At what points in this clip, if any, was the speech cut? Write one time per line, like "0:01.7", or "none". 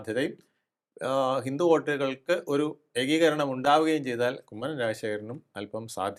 none